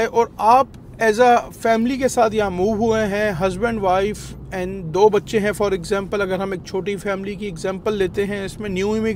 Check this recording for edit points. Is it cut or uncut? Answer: uncut